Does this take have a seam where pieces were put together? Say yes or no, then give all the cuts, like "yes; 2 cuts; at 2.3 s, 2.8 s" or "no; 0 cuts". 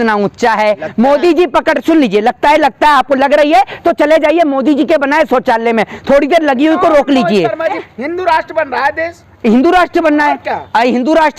yes; 1 cut; at 7.8 s